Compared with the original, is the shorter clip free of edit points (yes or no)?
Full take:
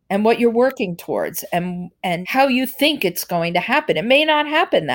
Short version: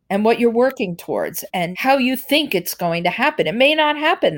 no